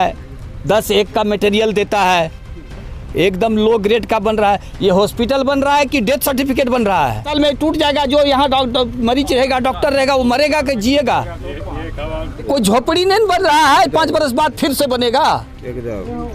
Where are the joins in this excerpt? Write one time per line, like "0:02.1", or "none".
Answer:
0:07.2
0:12.4